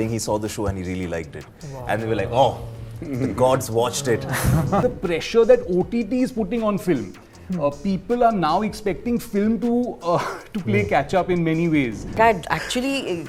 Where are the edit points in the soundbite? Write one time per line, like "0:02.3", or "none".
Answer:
0:04.8
0:12.2